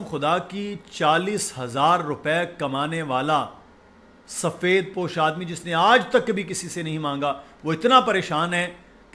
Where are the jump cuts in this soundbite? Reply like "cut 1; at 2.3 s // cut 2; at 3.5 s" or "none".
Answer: none